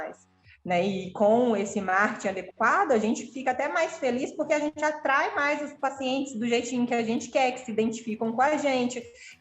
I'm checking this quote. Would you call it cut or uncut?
uncut